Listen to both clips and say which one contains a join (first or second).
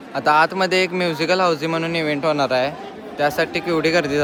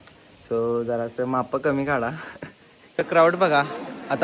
second